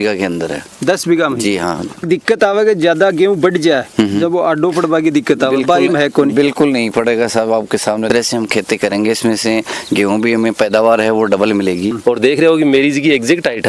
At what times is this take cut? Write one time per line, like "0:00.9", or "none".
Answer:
0:02.0
0:08.1
0:12.0